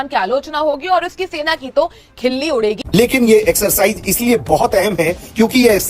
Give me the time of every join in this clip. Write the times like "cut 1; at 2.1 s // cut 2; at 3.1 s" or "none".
cut 1; at 2.8 s